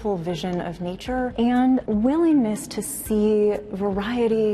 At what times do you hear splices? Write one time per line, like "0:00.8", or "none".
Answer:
0:01.3
0:01.9